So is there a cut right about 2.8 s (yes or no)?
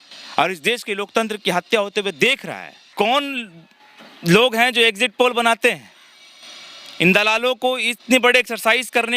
yes